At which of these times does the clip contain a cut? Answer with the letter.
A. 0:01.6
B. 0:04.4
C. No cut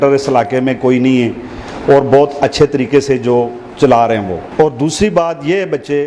B